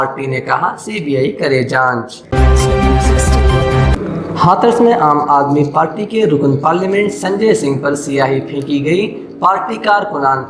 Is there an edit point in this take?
yes; 2 cuts; at 2.2 s, 3.9 s

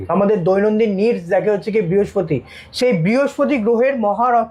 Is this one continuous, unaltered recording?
yes; 0 cuts

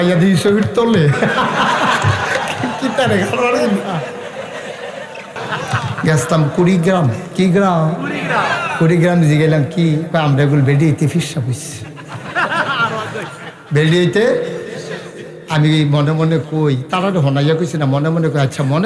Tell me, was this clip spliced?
yes; 1 cut; at 5.4 s

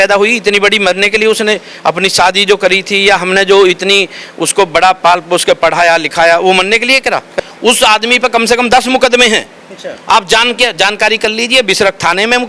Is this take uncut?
no; 1 cut; at 7.3 s

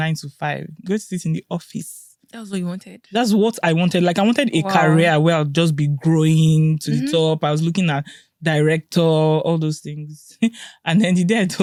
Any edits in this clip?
no; 0 cuts

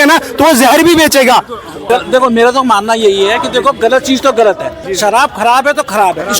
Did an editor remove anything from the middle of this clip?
yes; 2 cuts; at 1.8 s, 4.8 s

